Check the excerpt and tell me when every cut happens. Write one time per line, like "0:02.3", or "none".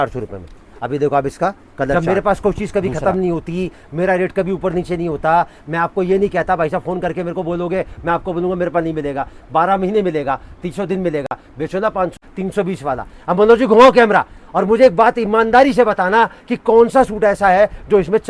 0:01.9
0:12.2

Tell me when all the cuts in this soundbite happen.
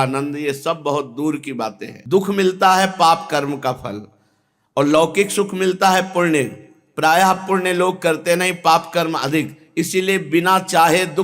0:01.9

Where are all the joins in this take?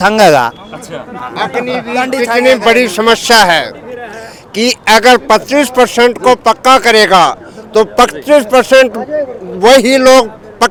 none

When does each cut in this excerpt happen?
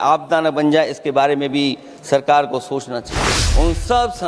0:03.3

